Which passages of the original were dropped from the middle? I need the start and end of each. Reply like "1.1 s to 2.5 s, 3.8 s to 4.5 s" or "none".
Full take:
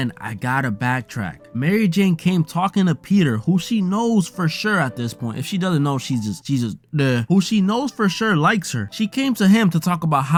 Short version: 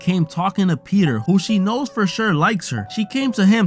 3.4 s to 7.2 s